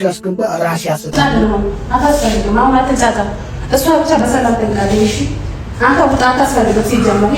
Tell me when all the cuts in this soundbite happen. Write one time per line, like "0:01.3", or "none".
0:01.3